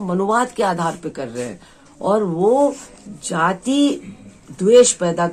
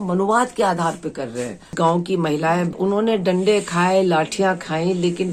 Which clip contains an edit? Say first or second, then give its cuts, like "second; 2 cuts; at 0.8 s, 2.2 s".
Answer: second; 2 cuts; at 1.7 s, 2.8 s